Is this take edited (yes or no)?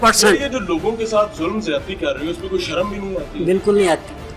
no